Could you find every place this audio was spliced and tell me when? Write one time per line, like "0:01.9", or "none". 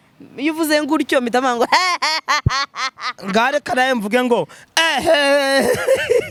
none

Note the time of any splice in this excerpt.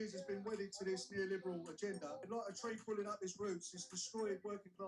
0:02.3

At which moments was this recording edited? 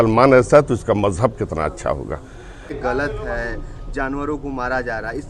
0:02.7

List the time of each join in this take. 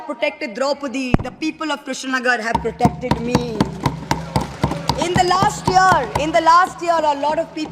none

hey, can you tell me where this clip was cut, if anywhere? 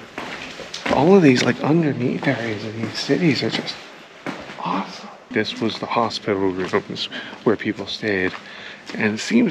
0:05.2

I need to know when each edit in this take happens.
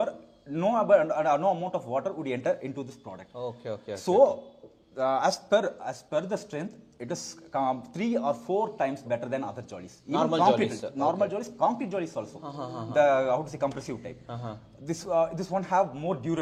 none

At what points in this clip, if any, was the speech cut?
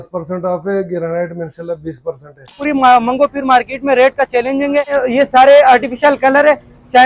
0:02.6
0:04.9

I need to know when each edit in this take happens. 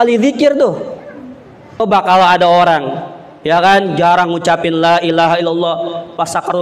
0:01.8

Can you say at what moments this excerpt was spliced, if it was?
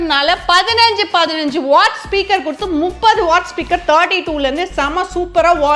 none

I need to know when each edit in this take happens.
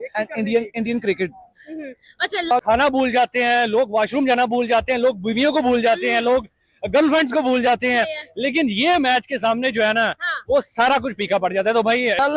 0:02.6

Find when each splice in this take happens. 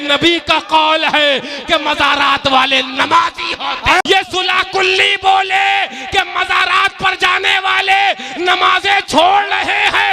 0:04.0

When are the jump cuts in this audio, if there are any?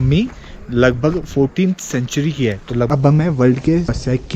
0:02.9

